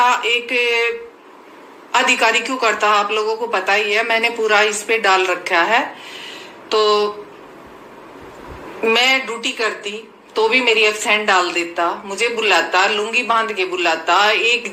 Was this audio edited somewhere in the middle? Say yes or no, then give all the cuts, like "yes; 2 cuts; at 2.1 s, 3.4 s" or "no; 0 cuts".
no; 0 cuts